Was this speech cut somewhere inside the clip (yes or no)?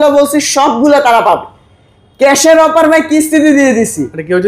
no